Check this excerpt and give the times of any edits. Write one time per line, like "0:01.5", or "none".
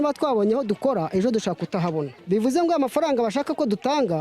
0:02.1